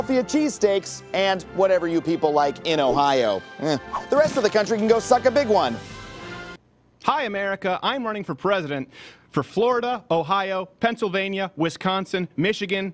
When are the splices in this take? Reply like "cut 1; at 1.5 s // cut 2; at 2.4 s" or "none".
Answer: cut 1; at 6.5 s